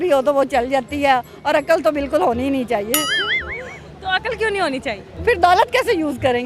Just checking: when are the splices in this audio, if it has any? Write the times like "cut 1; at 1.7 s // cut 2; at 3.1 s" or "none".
cut 1; at 5.1 s